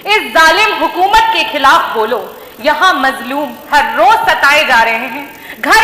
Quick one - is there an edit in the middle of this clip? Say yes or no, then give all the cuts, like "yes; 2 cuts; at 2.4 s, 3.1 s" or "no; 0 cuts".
no; 0 cuts